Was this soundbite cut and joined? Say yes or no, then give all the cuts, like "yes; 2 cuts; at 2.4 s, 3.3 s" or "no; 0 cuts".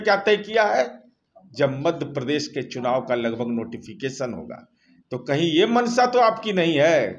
no; 0 cuts